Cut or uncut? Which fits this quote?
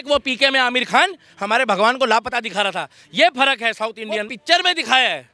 cut